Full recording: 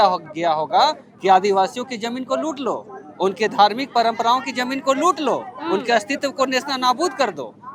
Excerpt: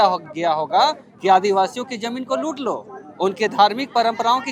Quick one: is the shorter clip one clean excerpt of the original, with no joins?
yes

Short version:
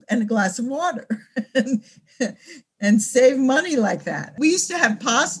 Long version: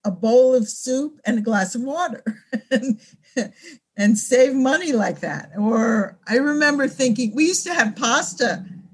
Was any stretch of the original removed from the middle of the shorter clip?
yes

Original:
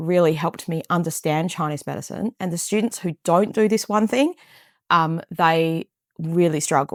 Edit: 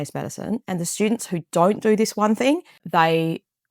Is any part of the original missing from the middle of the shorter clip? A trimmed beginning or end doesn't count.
yes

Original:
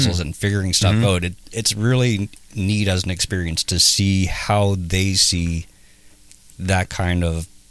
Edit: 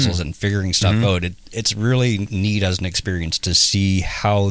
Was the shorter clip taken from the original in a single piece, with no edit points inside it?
no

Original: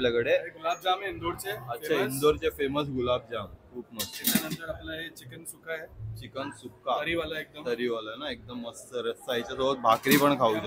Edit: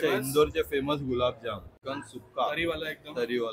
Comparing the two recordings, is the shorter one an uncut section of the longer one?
no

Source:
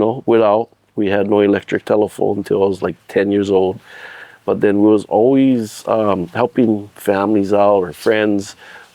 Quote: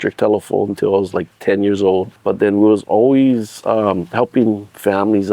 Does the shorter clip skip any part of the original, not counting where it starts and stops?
yes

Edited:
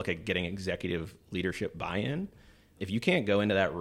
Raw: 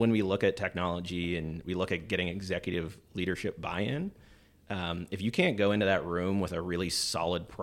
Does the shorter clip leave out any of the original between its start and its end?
yes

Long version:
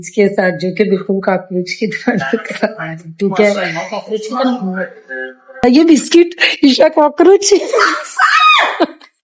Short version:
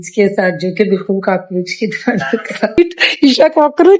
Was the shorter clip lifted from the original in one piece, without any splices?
no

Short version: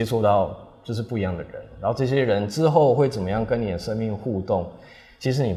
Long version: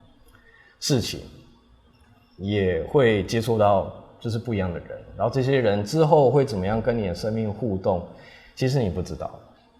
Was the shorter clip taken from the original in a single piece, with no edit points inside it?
yes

